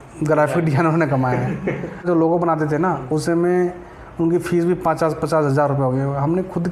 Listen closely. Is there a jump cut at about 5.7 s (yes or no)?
no